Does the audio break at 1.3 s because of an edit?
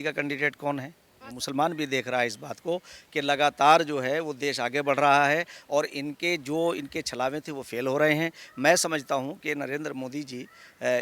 yes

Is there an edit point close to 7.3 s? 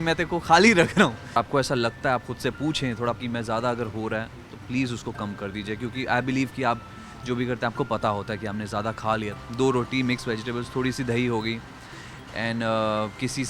no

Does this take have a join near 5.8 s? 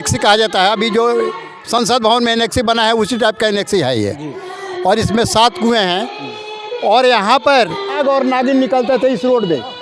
no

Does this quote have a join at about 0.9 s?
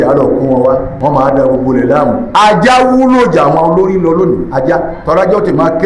yes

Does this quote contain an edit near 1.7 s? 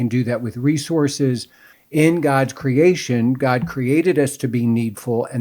yes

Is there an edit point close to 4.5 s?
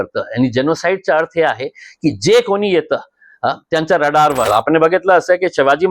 yes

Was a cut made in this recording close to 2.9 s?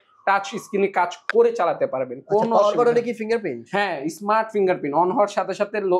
no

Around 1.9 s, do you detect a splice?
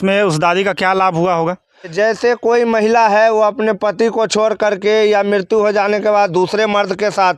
yes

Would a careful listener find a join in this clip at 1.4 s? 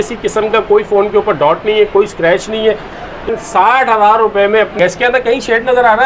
no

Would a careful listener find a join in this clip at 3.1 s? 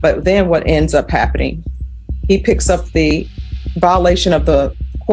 yes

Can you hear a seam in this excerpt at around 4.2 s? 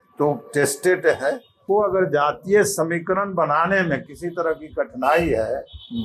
no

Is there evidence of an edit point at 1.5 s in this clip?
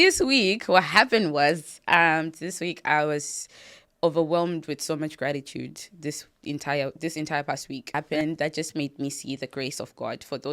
no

